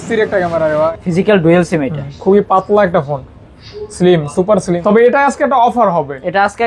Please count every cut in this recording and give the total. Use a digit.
2